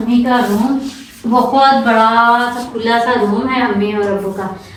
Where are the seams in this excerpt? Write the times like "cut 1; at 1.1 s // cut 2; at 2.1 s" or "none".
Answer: none

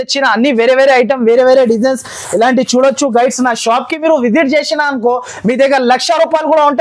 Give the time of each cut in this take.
none

